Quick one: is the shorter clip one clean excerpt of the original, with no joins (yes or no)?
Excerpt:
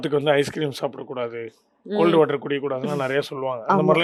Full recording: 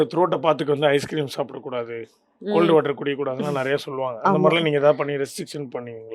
yes